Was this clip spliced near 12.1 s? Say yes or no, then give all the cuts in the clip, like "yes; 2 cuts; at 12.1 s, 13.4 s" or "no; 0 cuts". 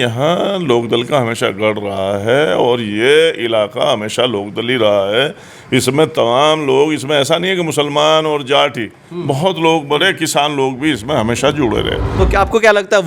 yes; 1 cut; at 12.1 s